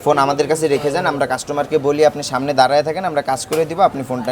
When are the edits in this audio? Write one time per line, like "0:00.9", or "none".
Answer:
none

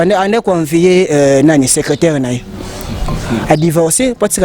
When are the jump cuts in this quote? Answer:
none

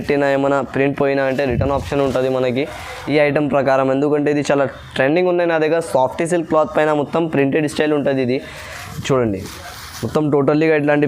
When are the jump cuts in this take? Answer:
none

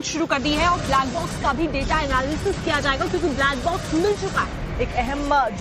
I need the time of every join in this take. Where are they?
0:02.0

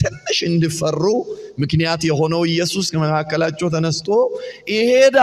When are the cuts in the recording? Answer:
none

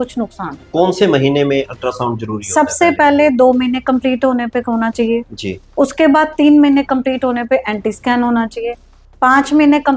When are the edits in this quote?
none

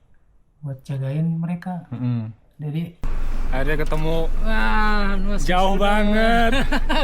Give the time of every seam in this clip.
0:03.1

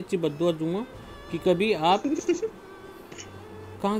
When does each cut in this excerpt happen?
none

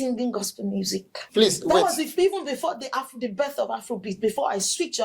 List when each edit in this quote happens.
0:01.2

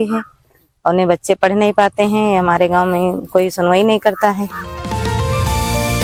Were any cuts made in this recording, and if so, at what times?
none

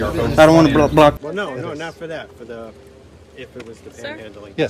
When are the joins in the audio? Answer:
0:01.2

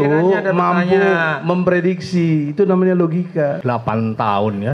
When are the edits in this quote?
0:03.6

